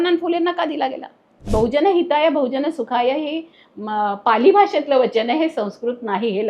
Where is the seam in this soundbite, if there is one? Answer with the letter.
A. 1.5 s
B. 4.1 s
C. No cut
A